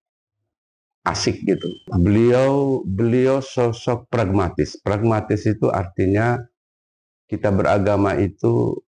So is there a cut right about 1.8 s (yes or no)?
yes